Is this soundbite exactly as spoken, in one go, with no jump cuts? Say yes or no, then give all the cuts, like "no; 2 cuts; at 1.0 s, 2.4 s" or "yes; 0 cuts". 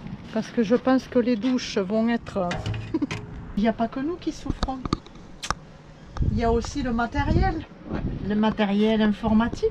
no; 1 cut; at 3.6 s